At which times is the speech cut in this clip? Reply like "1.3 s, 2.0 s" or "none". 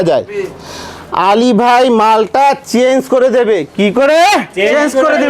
none